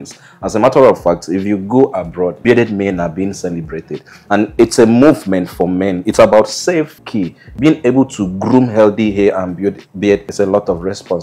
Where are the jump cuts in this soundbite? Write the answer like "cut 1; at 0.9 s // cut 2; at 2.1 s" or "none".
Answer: cut 1; at 7.0 s